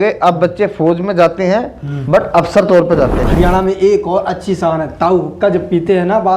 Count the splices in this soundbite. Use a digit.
1